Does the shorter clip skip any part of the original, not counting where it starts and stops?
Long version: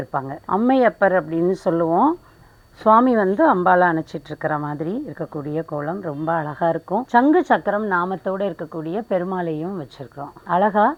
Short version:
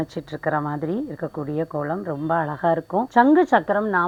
no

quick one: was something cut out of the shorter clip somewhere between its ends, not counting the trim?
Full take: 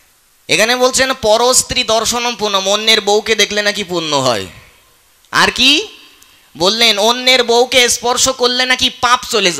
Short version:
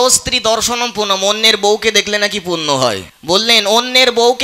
yes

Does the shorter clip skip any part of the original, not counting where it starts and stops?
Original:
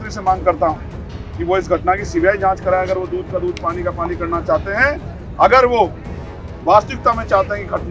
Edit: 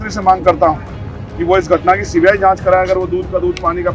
no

